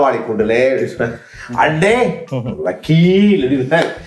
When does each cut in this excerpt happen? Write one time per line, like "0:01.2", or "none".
none